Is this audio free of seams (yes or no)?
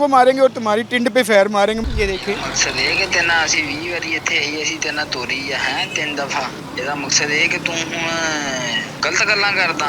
no